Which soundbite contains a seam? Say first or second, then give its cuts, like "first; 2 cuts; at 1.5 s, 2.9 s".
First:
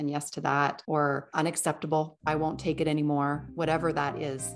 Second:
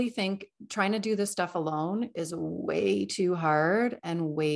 first; 3 cuts; at 0.9 s, 2.1 s, 3.5 s